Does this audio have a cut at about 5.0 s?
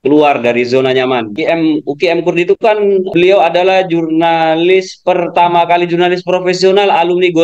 no; 2 cuts; at 1.3 s, 3.1 s

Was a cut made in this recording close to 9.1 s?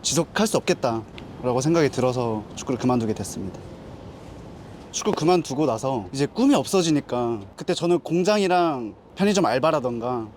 no; 4 cuts; at 3.6 s, 5.0 s, 6.1 s, 7.5 s

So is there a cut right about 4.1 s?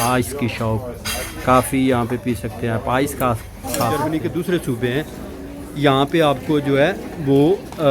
yes; 1 cut; at 4.1 s

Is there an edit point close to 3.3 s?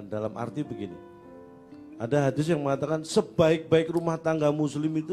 no; 0 cuts

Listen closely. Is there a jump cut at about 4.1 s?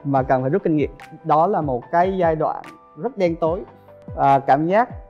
yes; 1 cut; at 4.1 s

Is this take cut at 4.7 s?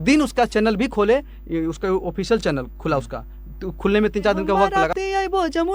yes; 1 cut; at 4.7 s

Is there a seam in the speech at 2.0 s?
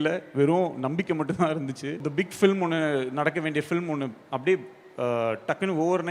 yes; 1 cut; at 2.0 s

